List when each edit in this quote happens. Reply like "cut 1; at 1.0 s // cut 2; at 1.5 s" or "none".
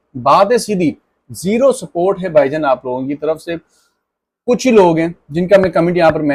none